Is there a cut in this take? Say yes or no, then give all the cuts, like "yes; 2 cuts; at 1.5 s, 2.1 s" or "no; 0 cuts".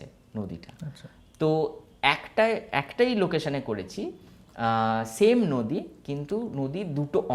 no; 0 cuts